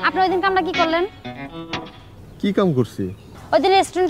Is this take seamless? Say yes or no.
yes